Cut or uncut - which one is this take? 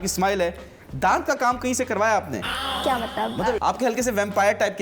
cut